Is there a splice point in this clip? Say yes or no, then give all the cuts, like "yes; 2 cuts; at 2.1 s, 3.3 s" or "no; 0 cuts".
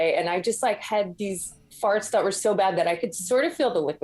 no; 0 cuts